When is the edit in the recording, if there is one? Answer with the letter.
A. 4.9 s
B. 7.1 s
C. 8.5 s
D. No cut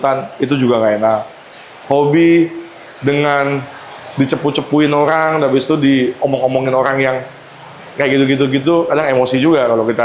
D